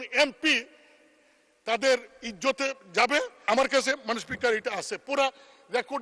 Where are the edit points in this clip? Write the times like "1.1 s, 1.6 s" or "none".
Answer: 3.4 s